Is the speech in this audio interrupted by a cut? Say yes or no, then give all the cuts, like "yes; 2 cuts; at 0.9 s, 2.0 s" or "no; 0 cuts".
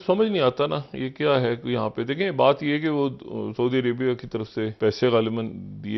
yes; 1 cut; at 4.7 s